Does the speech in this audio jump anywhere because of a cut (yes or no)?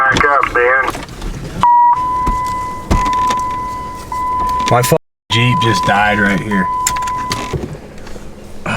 yes